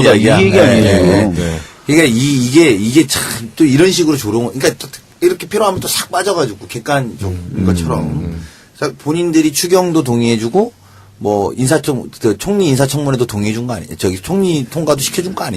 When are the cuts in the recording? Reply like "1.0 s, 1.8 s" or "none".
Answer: 2.6 s

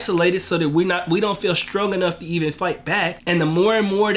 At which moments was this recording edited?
3.2 s

